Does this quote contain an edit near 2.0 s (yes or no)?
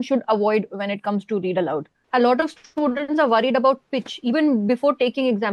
yes